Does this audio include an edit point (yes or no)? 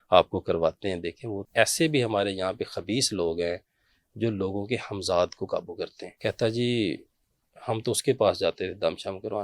yes